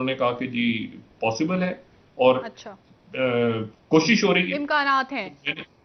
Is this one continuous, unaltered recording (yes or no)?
yes